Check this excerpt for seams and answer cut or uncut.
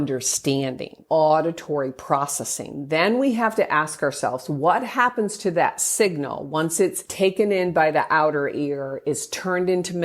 cut